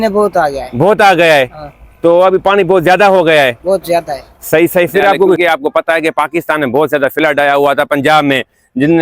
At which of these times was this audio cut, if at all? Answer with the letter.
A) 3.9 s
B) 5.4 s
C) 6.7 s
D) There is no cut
B